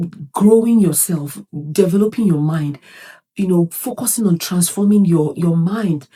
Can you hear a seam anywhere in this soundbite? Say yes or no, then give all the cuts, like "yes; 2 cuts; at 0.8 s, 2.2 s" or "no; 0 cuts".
no; 0 cuts